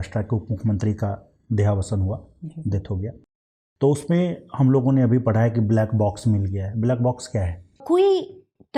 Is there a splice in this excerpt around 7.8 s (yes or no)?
yes